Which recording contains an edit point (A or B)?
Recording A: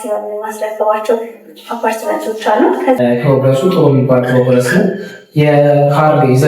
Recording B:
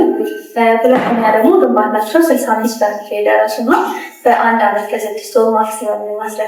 A